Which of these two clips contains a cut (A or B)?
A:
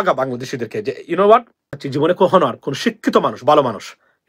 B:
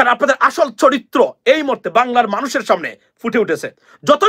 A